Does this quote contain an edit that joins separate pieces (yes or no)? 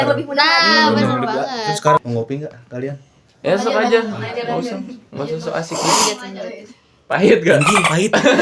yes